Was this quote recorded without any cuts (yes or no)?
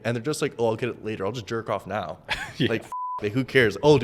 yes